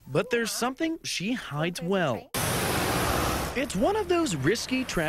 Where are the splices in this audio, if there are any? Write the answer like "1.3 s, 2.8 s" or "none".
2.3 s